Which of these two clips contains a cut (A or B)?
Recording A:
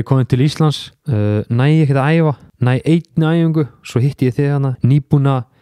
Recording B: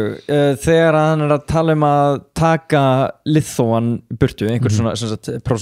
A